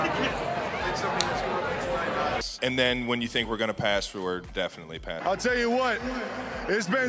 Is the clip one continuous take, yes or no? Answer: yes